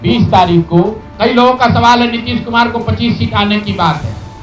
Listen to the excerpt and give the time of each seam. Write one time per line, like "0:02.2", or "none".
0:01.1